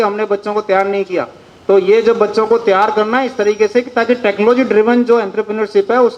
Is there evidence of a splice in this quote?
no; 0 cuts

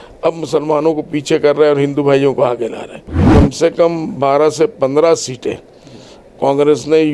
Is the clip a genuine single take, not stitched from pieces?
no; 1 cut; at 3.2 s

